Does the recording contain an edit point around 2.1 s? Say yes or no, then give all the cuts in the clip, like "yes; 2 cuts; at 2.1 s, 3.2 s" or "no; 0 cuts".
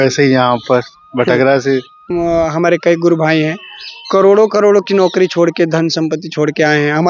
yes; 1 cut; at 2.1 s